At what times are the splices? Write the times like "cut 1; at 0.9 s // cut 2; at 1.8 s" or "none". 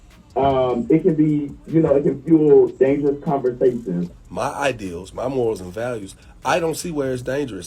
cut 1; at 4.2 s